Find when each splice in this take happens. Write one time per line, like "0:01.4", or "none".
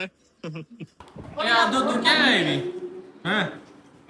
0:01.0